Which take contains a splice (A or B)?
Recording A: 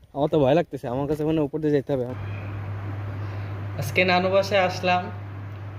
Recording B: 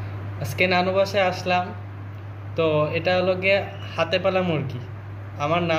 A